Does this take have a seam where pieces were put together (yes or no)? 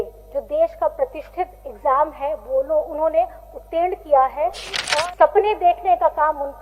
yes